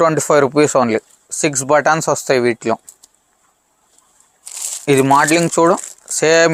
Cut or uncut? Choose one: uncut